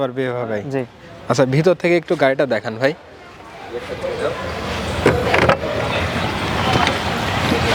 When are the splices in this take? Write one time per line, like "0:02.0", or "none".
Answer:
none